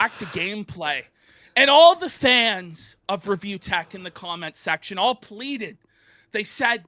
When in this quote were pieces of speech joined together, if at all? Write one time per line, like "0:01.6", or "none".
none